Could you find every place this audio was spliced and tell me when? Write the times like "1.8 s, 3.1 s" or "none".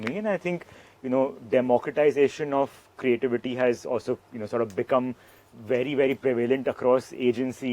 none